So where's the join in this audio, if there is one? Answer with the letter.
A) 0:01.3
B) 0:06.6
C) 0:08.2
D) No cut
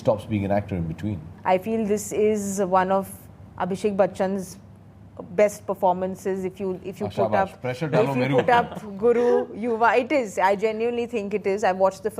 A